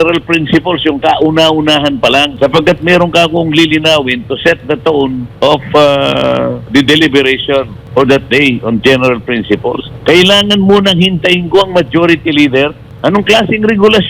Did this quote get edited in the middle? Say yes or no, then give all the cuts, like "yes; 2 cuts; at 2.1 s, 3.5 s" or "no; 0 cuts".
yes; 6 cuts; at 2.3 s, 5.3 s, 6.7 s, 7.8 s, 9.9 s, 12.8 s